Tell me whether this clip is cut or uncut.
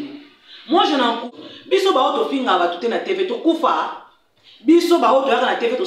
cut